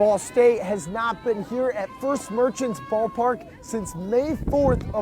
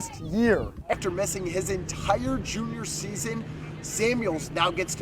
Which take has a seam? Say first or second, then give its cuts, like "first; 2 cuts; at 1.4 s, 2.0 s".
second; 1 cut; at 0.9 s